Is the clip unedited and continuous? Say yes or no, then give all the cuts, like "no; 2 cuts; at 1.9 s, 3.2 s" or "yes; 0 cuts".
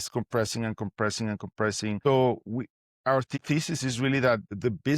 no; 1 cut; at 3.3 s